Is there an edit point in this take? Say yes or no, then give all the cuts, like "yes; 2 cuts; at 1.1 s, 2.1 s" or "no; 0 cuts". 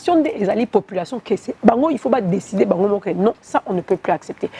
no; 0 cuts